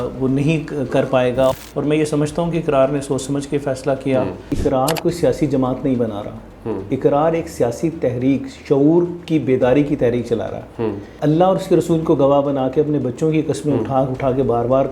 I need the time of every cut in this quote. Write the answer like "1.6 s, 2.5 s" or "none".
1.7 s, 4.5 s, 11.1 s